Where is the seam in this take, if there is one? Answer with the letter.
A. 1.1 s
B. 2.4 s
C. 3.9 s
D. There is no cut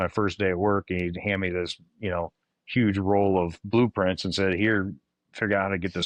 D